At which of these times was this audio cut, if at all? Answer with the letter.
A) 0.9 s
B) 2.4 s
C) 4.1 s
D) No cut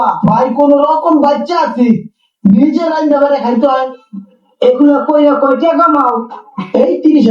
C